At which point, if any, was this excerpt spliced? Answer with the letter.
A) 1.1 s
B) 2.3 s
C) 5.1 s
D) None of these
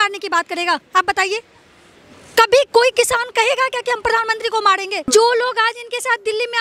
C